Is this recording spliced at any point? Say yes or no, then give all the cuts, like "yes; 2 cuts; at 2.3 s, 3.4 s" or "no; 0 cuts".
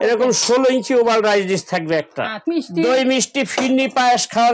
yes; 1 cut; at 2.5 s